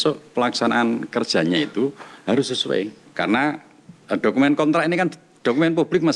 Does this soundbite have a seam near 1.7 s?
no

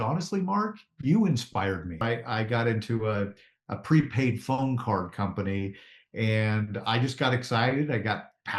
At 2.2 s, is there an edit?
yes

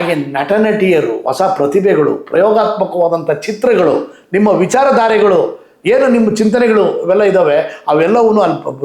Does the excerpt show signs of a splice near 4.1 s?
no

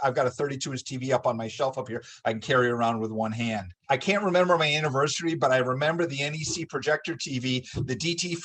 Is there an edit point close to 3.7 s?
yes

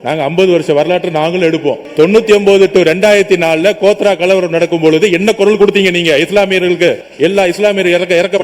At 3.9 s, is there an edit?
no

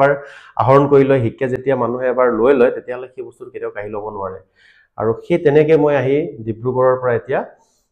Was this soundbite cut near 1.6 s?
no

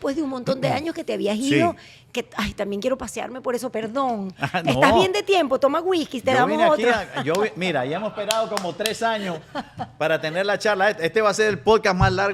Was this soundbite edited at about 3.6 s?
no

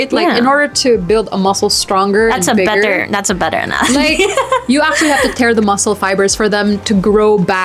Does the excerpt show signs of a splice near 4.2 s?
no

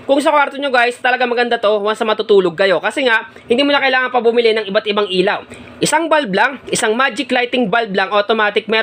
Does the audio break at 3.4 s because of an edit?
no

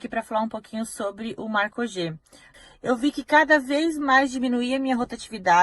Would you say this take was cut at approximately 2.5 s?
yes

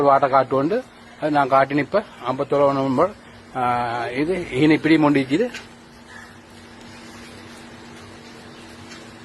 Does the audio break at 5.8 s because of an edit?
yes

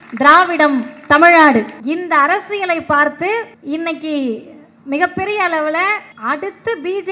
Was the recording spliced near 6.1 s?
yes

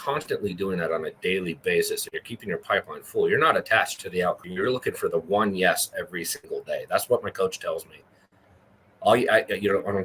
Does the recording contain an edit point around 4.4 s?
yes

